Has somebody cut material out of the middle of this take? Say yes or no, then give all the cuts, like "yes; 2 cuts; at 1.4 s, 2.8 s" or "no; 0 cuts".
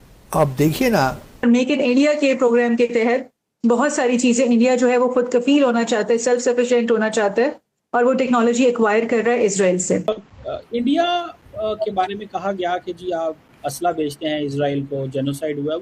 no; 0 cuts